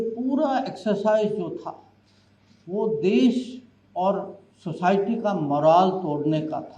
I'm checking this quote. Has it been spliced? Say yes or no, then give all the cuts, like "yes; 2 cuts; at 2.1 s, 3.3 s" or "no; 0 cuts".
no; 0 cuts